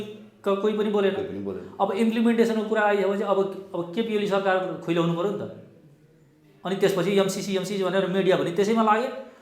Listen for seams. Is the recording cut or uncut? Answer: uncut